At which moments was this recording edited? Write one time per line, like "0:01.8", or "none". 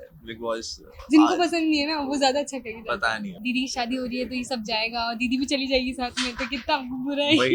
0:03.3